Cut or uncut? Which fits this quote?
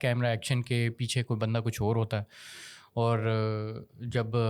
uncut